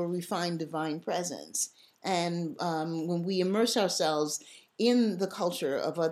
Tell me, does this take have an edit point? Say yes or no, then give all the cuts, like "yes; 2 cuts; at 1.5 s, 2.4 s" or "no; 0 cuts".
no; 0 cuts